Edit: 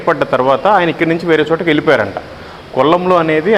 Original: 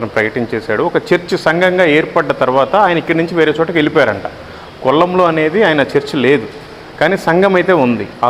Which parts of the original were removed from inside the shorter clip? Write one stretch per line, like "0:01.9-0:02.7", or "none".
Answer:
none